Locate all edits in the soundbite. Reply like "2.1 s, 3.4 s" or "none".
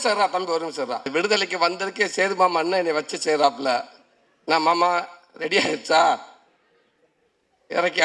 1.1 s

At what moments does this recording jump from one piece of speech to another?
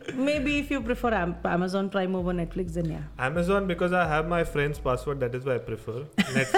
none

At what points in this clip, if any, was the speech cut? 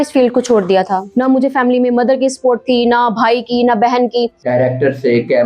1.0 s, 4.4 s

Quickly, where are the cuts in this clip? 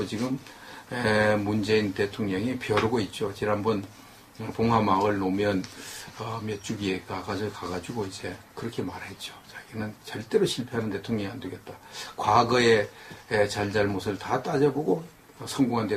none

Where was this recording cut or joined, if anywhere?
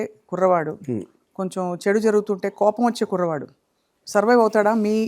none

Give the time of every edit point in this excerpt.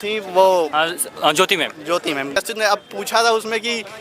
2.4 s

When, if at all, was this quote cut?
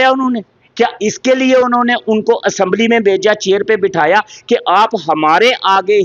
none

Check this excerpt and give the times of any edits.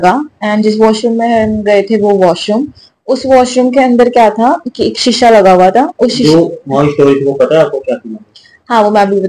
none

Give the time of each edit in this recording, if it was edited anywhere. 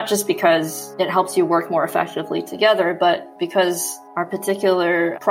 3.3 s

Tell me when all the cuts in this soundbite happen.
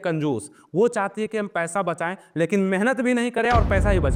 none

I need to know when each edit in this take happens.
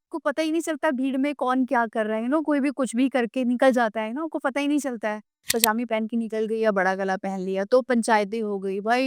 5.5 s

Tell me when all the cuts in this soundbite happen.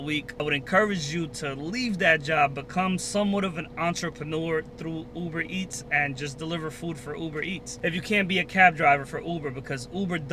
none

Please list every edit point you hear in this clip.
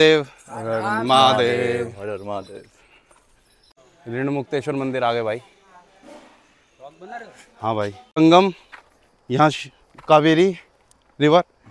8.0 s

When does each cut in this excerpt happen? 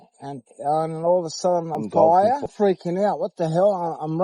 1.7 s, 2.5 s

